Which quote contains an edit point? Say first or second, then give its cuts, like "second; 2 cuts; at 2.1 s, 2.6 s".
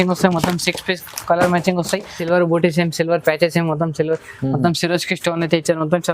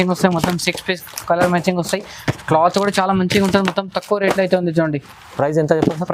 first; 1 cut; at 2.2 s